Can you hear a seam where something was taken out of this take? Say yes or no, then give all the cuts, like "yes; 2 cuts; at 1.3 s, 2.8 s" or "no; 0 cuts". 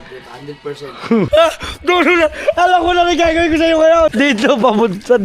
yes; 2 cuts; at 1.3 s, 4.1 s